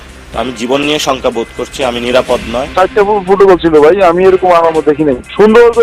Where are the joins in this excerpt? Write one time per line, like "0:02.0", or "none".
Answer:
0:02.8